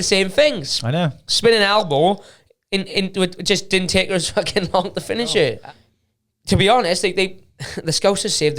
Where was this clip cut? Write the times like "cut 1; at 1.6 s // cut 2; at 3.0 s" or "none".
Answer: cut 1; at 5.6 s